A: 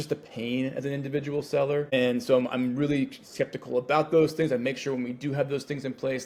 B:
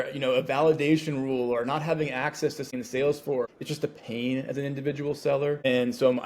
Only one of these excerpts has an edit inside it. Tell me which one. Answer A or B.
B